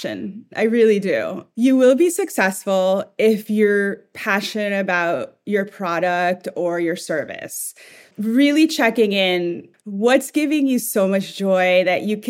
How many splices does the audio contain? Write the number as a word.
three